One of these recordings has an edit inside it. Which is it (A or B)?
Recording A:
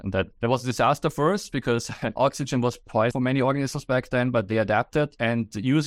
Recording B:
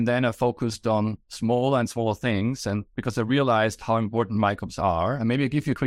A